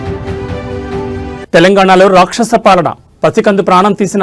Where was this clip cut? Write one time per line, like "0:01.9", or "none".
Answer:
0:01.2